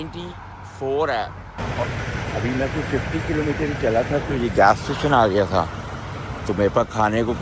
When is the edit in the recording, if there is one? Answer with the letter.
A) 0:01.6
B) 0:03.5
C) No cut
A